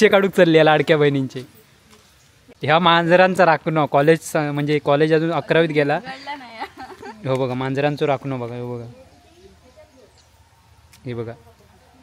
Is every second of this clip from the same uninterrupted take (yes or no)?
yes